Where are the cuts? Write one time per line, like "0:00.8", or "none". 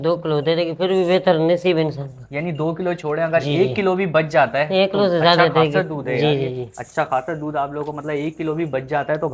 none